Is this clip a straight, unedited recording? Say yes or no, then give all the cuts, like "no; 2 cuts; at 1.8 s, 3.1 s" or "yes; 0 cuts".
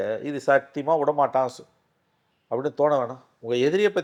yes; 0 cuts